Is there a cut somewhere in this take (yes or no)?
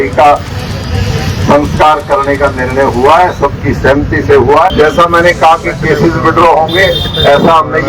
yes